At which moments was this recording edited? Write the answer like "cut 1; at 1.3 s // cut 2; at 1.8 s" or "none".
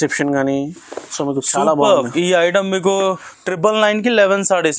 cut 1; at 3.3 s

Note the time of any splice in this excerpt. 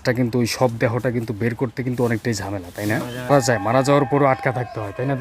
cut 1; at 3.3 s

